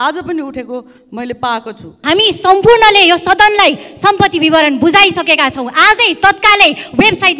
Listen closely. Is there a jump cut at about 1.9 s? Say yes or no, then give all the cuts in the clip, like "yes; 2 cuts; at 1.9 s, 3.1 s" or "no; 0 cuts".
yes; 1 cut; at 1.9 s